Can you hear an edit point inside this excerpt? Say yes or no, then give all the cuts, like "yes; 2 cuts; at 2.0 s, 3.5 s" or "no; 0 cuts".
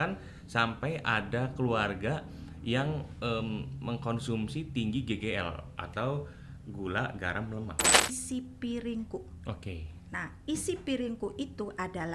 yes; 1 cut; at 8.2 s